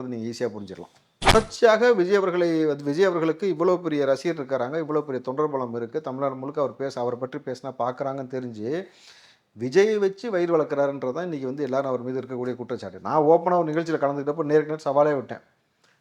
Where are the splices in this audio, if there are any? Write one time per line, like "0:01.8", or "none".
0:01.3